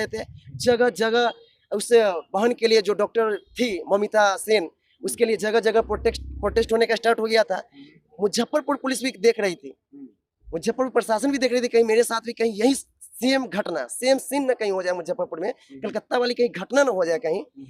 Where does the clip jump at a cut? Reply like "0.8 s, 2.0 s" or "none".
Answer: none